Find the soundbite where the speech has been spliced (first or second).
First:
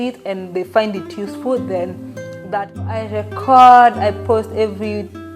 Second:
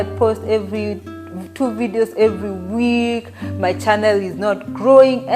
first